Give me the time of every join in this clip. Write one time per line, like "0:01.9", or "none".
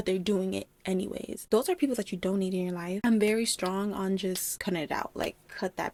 none